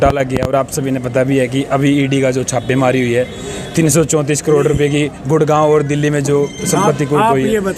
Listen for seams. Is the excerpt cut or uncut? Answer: uncut